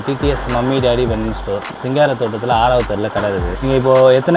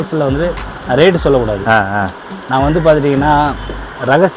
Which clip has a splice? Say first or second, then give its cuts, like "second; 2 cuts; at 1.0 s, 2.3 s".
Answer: first; 2 cuts; at 1.7 s, 3.5 s